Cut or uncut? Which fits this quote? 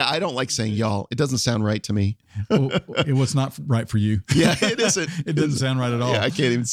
uncut